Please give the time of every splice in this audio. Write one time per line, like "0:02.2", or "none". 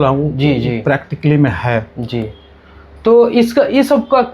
none